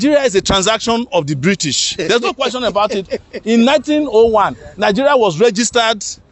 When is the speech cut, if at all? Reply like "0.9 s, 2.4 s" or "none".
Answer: none